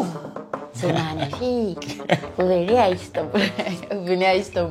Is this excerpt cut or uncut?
uncut